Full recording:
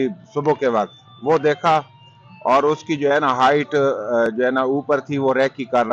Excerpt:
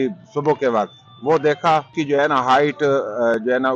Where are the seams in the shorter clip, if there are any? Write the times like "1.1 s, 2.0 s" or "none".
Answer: 1.9 s